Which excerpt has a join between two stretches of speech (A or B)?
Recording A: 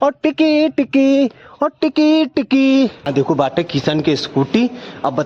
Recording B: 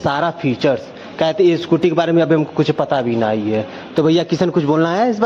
A